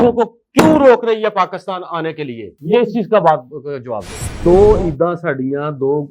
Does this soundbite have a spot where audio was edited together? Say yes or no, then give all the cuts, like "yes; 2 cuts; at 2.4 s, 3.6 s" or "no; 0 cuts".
yes; 1 cut; at 4.3 s